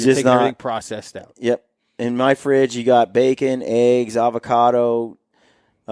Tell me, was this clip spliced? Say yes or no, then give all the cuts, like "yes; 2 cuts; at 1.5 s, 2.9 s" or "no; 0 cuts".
no; 0 cuts